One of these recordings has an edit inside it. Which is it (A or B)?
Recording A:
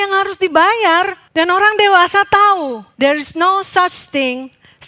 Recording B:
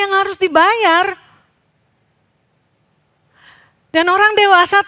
A